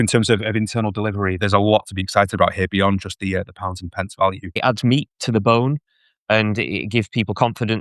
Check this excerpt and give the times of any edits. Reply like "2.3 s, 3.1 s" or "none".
1.4 s, 4.5 s